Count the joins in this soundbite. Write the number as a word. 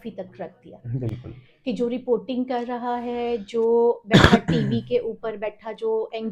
zero